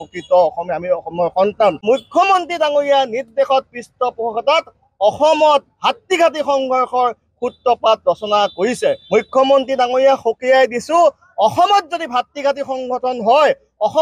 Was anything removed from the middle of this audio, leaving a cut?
yes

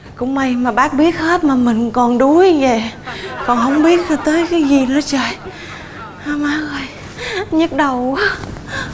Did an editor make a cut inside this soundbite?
no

